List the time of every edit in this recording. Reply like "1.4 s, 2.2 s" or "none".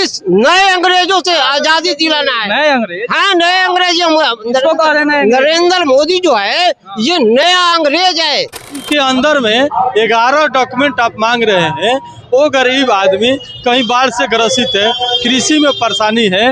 8.8 s